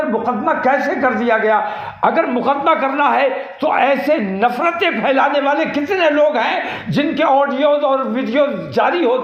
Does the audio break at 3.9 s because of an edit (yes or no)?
no